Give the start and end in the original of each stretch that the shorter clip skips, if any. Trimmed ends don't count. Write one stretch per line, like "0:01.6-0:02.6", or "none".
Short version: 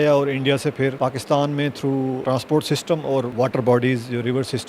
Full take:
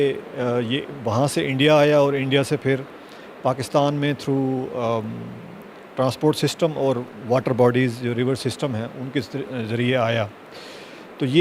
0:02.8-0:03.4
0:04.6-0:05.9
0:07.0-0:07.2